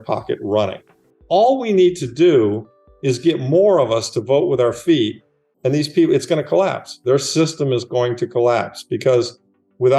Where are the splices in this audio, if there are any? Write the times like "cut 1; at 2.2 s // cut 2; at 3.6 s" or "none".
cut 1; at 1.0 s